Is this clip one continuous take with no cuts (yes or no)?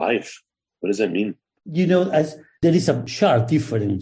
no